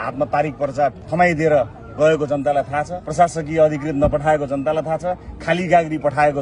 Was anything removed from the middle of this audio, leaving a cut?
yes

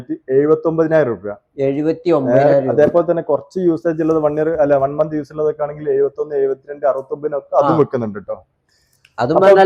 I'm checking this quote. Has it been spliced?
no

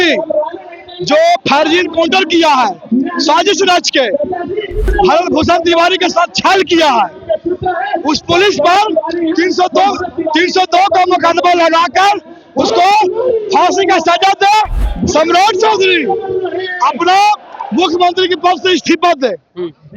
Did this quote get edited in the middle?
yes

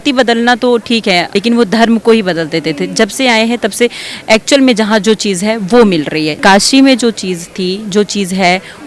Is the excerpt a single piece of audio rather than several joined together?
no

